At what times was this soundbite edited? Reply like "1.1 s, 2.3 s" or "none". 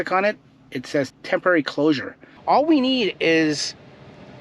1.1 s, 2.3 s